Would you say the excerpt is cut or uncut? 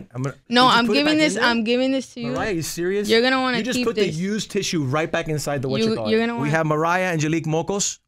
cut